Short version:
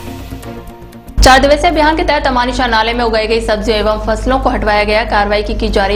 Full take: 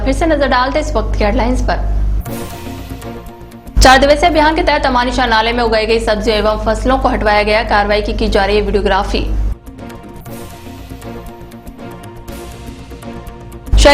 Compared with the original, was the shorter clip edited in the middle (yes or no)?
no